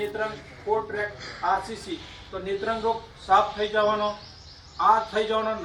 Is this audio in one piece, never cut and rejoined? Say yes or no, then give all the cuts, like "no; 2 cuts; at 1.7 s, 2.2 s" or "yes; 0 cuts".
yes; 0 cuts